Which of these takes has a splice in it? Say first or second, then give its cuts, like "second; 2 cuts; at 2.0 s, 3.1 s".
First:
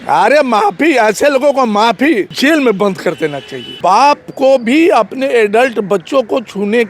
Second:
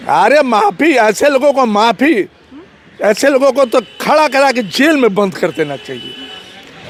first; 2 cuts; at 2.3 s, 3.7 s